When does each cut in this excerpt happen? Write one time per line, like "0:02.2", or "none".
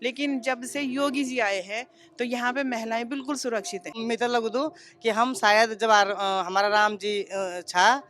0:04.0